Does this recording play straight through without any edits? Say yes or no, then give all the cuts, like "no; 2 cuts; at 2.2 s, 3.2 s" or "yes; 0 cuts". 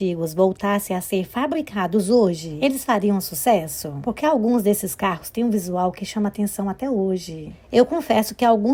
yes; 0 cuts